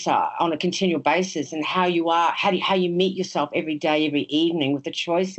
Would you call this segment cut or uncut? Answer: uncut